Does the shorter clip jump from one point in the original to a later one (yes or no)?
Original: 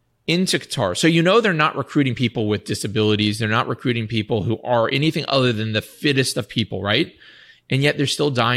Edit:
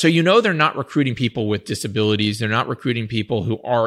no